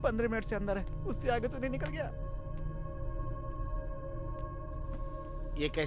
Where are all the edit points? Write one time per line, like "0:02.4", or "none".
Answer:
none